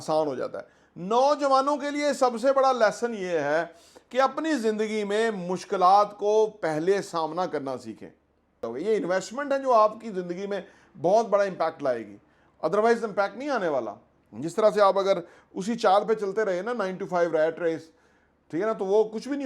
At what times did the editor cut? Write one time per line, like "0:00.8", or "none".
0:08.6